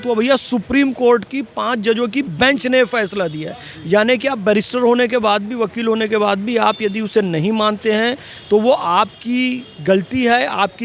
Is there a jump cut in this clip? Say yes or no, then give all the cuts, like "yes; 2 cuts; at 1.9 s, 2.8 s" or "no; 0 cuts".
no; 0 cuts